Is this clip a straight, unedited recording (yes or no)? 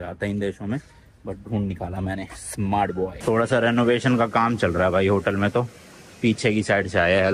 yes